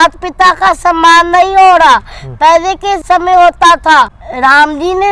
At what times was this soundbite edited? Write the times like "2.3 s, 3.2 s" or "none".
3.0 s, 4.2 s